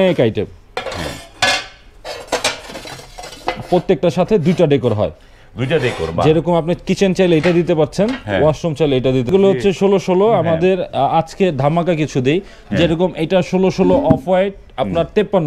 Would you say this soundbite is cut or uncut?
cut